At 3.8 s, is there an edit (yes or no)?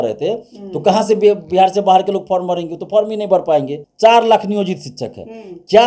yes